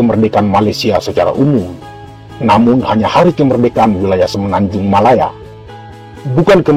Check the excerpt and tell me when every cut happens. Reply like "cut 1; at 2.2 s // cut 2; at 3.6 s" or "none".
none

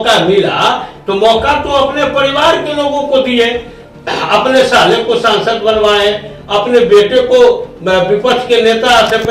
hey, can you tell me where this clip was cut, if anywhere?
none

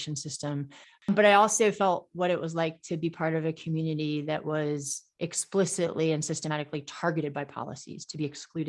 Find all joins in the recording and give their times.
cut 1; at 1.1 s

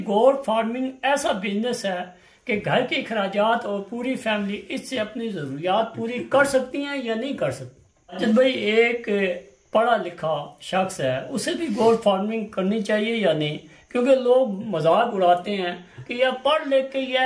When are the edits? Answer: cut 1; at 8.1 s

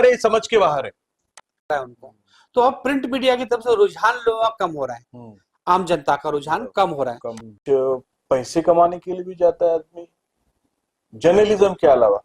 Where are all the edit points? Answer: cut 1; at 1.7 s // cut 2; at 7.5 s

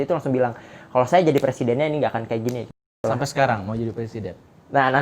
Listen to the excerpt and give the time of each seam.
cut 1; at 2.9 s

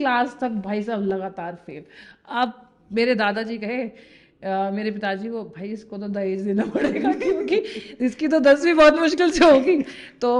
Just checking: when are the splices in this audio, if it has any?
none

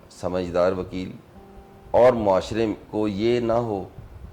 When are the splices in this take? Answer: none

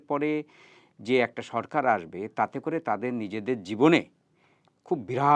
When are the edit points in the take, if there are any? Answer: none

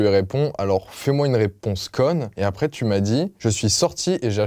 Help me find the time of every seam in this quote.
cut 1; at 2.3 s // cut 2; at 3.3 s

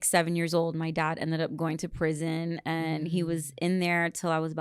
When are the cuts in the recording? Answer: none

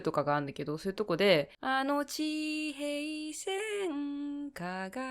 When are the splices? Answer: cut 1; at 1.6 s

